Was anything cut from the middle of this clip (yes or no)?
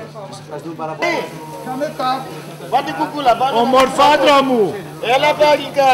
yes